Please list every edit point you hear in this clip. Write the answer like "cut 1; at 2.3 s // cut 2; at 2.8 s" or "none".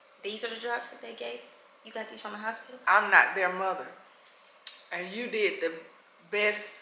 cut 1; at 2.8 s